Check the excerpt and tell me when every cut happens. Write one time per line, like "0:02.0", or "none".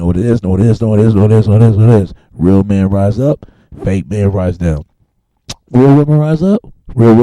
0:05.0